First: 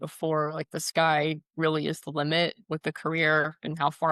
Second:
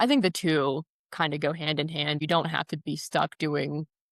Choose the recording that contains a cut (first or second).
second